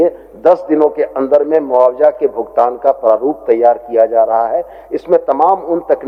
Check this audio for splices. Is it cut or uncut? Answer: uncut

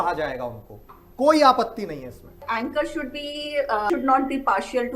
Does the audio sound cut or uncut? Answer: cut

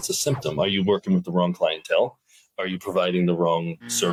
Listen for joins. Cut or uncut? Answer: uncut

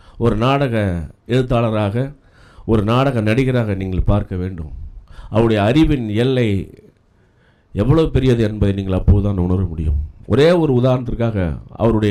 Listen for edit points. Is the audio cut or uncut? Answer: uncut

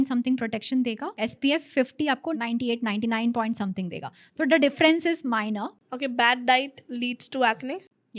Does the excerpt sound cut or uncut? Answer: cut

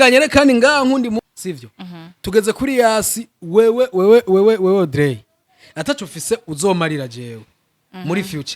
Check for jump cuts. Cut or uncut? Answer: cut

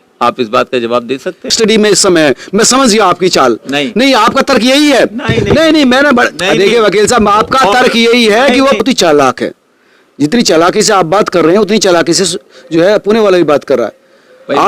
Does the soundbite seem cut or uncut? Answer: cut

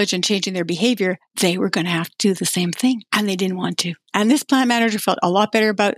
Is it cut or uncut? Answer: cut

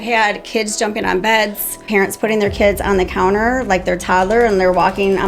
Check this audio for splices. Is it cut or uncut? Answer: cut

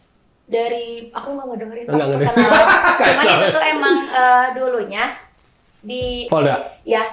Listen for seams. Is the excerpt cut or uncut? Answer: cut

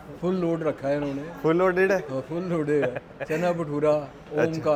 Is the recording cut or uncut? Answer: uncut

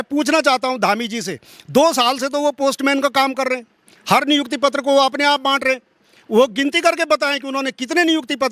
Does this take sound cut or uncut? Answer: uncut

